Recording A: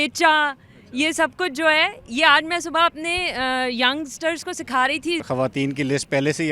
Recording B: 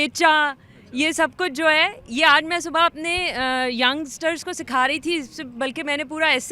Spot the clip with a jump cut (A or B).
A